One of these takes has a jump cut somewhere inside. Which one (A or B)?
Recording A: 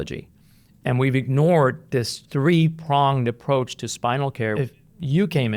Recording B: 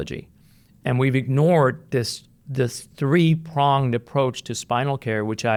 A